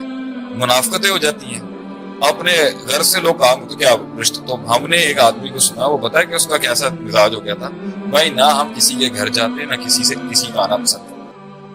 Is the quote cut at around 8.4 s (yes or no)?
no